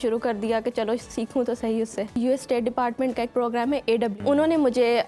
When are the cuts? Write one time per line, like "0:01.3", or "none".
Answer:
0:02.2
0:04.2